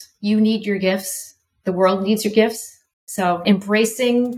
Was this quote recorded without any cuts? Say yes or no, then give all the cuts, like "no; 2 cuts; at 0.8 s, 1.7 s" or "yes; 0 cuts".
no; 1 cut; at 3.4 s